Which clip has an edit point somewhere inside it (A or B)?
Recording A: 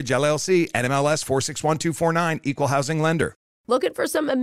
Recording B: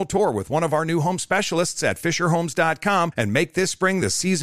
A